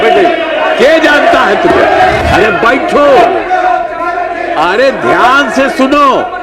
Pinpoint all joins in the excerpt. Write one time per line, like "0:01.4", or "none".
0:02.2